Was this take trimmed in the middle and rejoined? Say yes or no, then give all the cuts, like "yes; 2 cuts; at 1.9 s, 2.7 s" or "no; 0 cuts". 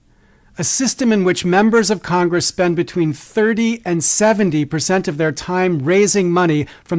yes; 1 cut; at 1.0 s